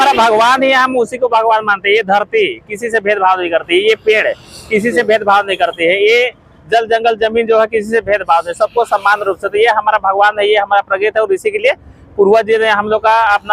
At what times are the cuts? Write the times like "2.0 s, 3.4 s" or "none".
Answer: none